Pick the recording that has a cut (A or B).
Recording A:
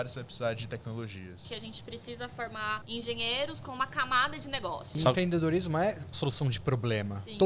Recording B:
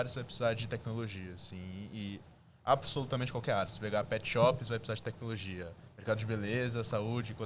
A